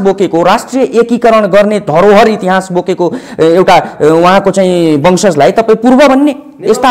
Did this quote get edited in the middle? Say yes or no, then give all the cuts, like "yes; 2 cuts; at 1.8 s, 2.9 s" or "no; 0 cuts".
no; 0 cuts